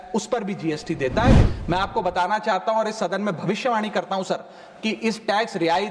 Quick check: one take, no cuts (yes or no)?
no